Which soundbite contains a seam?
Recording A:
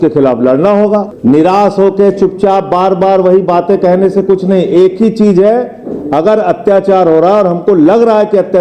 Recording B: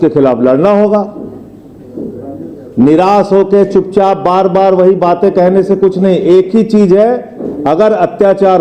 A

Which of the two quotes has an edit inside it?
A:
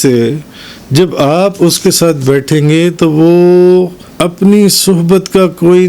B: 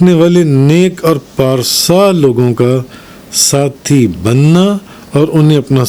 A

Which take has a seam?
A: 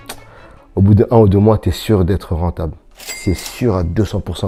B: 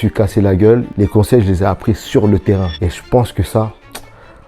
B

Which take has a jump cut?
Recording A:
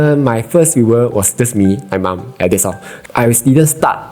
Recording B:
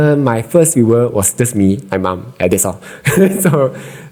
A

